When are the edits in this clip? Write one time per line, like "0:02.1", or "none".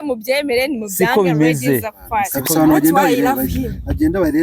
0:02.4